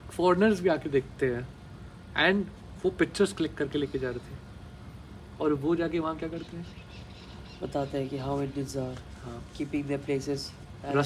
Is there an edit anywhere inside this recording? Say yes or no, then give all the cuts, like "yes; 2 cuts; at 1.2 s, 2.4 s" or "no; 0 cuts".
no; 0 cuts